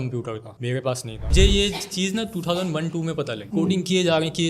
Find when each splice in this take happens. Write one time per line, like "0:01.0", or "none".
0:01.3